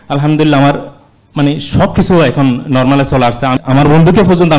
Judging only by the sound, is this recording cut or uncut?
cut